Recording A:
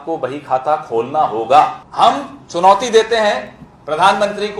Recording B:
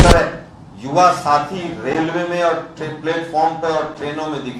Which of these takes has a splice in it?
A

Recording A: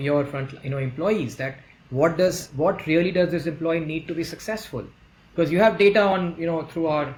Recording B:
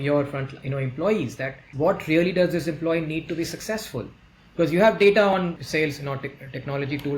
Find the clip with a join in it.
B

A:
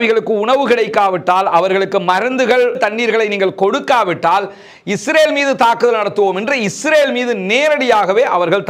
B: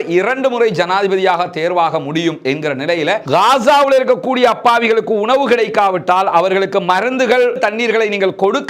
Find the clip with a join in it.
B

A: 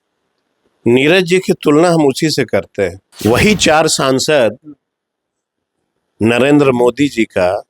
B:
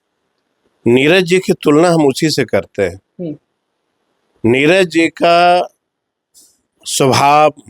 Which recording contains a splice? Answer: A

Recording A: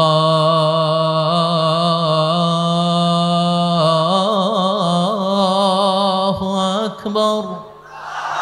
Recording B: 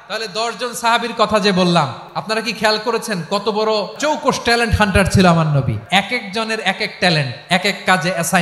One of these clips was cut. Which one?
B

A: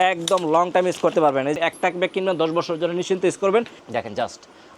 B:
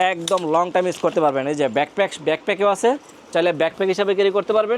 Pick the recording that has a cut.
A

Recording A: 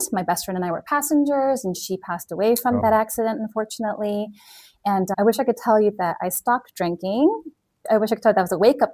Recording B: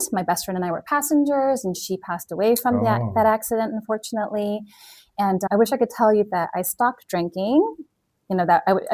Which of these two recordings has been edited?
A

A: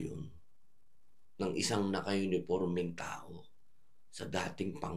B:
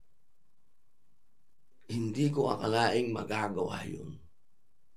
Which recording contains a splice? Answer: B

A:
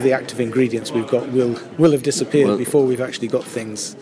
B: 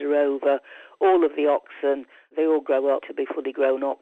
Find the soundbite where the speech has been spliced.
B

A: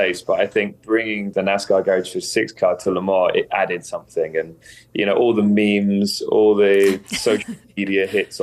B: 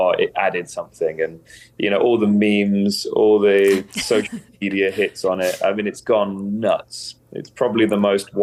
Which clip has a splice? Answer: A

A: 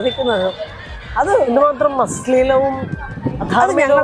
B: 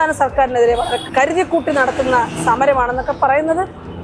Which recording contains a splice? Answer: B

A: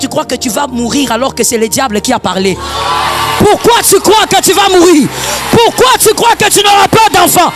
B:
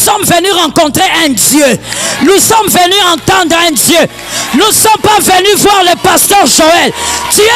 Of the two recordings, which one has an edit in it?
A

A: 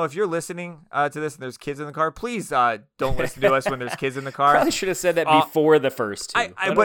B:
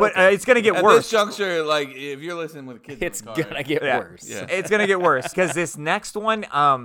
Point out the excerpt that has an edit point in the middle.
B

